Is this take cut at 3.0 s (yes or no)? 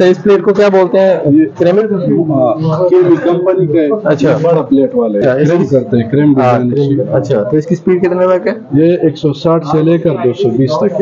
no